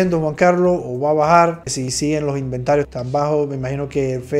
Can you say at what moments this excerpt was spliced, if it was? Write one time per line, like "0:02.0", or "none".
0:01.8

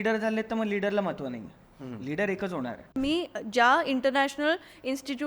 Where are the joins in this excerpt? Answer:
0:03.0

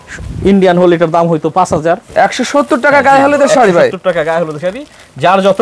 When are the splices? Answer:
0:02.0

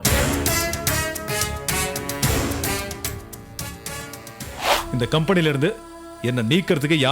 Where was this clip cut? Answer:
0:04.4

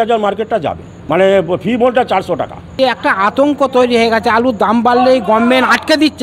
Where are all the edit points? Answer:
0:00.9
0:02.7

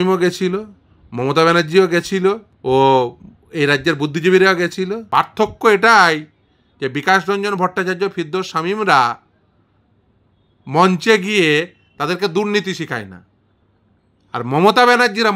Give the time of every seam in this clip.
0:02.5
0:05.0

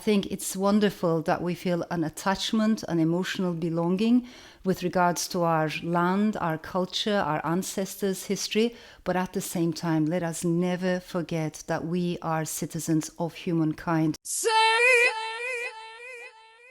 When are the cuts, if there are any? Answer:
0:14.3

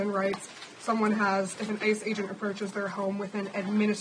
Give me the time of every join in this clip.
none

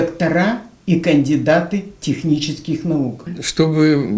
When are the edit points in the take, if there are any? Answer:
0:03.3

